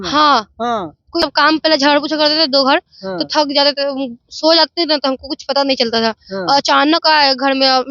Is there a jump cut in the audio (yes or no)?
yes